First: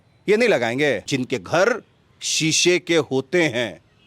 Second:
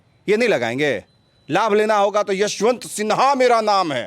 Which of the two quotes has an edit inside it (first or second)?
first